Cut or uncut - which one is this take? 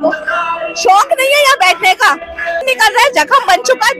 cut